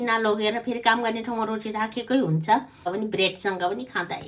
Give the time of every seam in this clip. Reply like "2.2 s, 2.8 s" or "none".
2.9 s

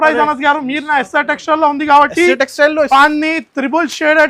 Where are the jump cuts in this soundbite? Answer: 2.9 s

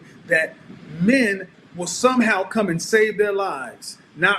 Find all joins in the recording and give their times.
1.5 s

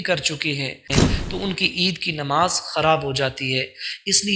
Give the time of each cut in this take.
1.0 s

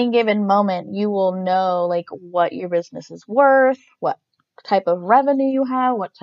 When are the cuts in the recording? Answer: none

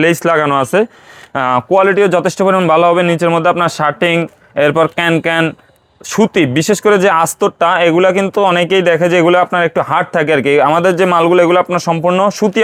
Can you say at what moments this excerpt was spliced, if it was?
none

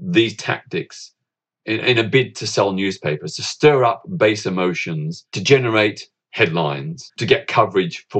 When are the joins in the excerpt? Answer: 5.4 s, 6.2 s, 7.1 s

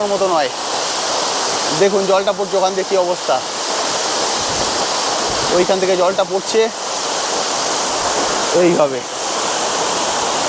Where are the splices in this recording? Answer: none

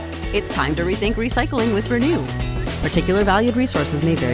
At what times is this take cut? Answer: none

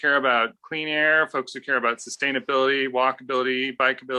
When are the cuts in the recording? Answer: none

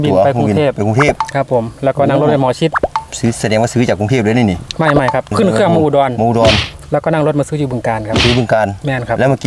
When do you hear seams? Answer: 5.3 s

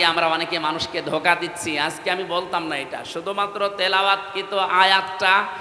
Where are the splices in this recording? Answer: none

